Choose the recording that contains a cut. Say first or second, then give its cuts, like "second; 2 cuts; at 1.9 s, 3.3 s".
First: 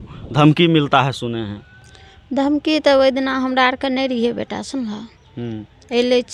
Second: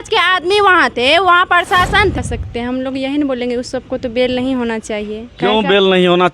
second; 1 cut; at 2.1 s